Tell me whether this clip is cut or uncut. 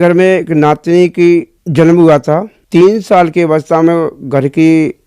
cut